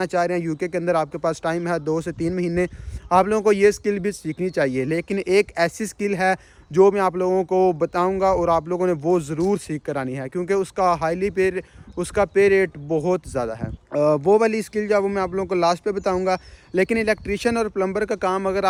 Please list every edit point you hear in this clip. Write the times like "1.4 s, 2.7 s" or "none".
none

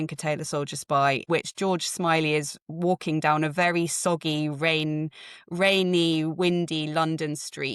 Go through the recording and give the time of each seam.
1.3 s

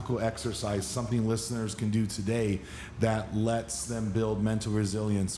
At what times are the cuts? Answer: none

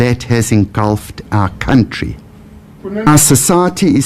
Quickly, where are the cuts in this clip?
3.1 s

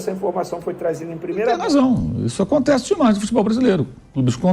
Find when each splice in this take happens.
1.5 s

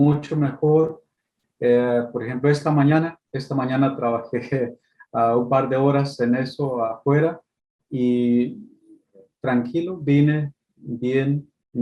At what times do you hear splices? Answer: none

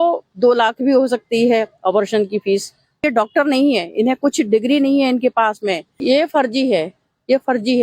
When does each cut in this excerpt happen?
3.0 s, 5.9 s

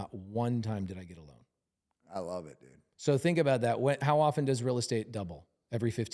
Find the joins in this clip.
none

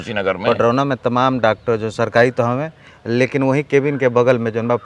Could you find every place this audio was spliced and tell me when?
none

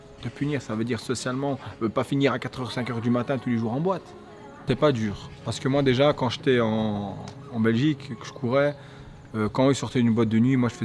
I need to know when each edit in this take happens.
4.6 s

